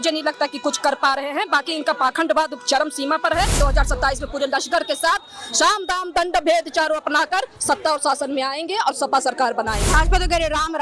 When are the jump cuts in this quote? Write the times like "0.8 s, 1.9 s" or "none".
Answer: 3.5 s, 9.8 s